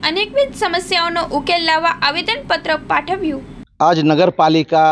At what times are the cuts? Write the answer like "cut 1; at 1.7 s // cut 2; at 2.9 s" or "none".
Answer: none

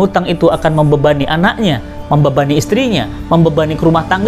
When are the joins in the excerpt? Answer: none

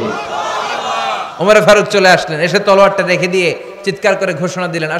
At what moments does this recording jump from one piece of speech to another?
none

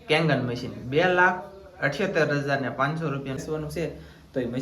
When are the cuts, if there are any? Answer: cut 1; at 3.4 s

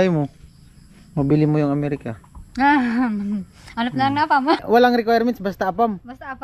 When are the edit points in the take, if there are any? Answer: cut 1; at 4.6 s

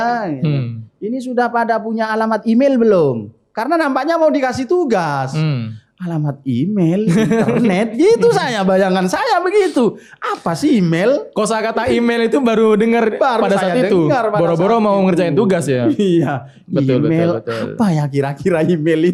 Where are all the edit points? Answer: none

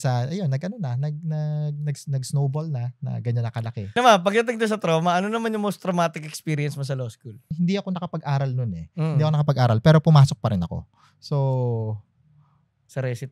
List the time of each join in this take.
cut 1; at 4.0 s // cut 2; at 7.5 s

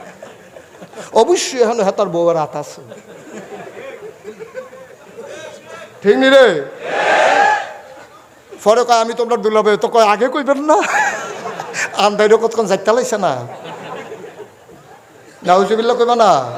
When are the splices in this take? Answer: none

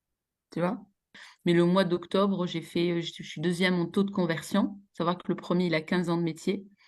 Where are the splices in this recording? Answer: cut 1; at 1.2 s

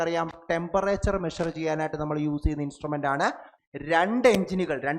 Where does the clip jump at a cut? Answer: cut 1; at 3.5 s

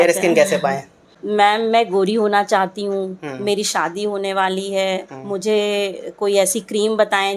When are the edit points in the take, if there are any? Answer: cut 1; at 1.2 s

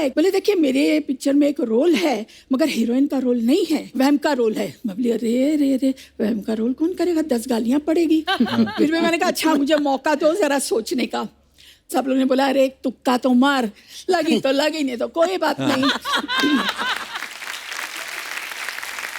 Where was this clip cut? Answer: none

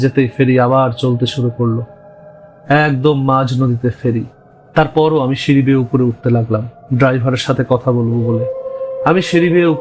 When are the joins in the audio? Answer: none

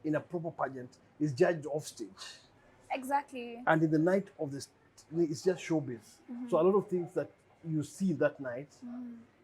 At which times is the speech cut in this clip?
none

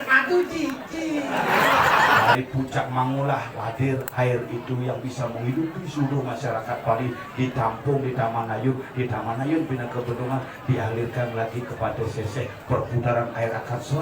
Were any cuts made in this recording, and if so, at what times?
cut 1; at 2.3 s

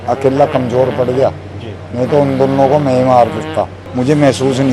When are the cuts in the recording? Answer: cut 1; at 3.8 s

